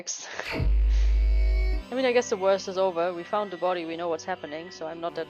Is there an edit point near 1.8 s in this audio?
yes; 1 cut; at 1.8 s

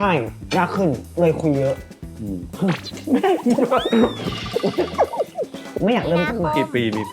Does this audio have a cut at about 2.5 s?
no; 1 cut; at 5.7 s

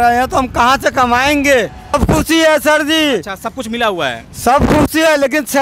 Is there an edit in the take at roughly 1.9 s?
yes; 1 cut; at 1.9 s

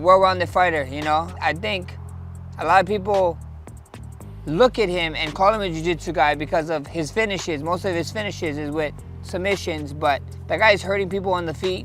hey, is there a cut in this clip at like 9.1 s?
no; 0 cuts

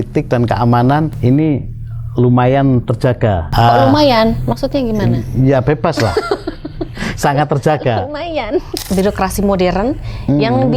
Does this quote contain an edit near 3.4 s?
yes; 3 cuts; at 1.1 s, 3.4 s, 8.8 s

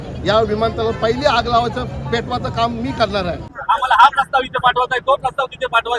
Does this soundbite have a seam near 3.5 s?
yes; 1 cut; at 3.5 s

